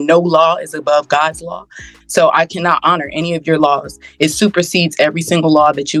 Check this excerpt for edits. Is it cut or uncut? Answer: uncut